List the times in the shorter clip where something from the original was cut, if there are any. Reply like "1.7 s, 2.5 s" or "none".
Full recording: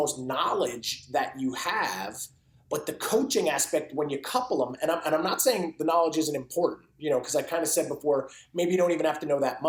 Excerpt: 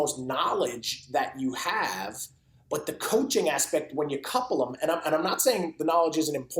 none